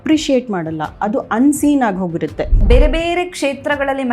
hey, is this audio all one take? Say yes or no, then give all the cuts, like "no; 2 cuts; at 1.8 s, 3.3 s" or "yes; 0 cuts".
no; 1 cut; at 2.6 s